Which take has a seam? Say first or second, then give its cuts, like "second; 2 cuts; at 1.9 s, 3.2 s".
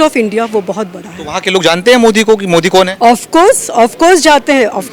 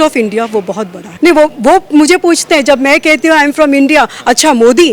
second; 1 cut; at 1.0 s